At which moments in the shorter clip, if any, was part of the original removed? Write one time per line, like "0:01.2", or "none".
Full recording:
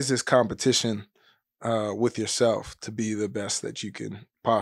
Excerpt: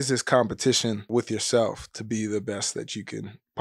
0:01.1